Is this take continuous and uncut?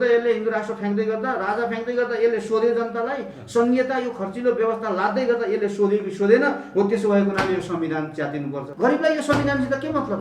no; 1 cut; at 8.7 s

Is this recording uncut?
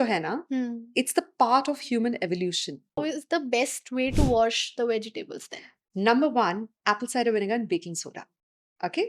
no; 1 cut; at 3.0 s

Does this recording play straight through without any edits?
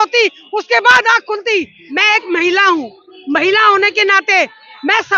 no; 1 cut; at 1.8 s

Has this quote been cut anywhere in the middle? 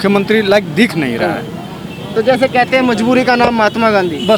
no; 0 cuts

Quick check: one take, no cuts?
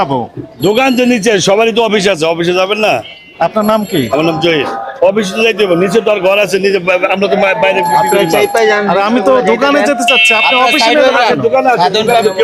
yes; 0 cuts

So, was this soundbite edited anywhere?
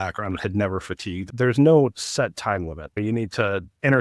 yes; 2 cuts; at 1.3 s, 3.0 s

